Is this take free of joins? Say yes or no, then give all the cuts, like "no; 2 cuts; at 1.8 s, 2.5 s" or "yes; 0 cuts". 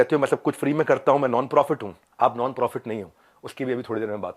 no; 1 cut; at 2.0 s